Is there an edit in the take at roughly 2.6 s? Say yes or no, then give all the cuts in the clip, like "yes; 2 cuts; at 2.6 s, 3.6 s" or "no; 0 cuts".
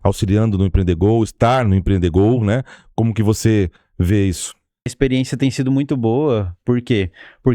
no; 1 cut; at 4.9 s